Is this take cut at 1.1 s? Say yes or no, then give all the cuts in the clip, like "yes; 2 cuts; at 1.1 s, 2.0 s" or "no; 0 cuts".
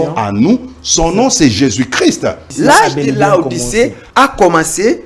no; 2 cuts; at 2.5 s, 4.0 s